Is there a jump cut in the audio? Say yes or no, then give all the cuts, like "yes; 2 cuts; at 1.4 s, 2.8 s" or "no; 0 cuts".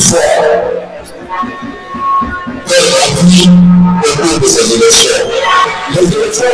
yes; 1 cut; at 5.6 s